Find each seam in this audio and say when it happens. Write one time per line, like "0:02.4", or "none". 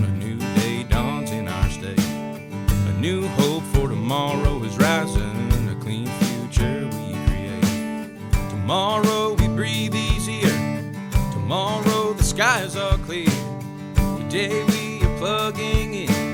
none